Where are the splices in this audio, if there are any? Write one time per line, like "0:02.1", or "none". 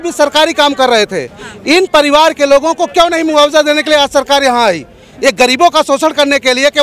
none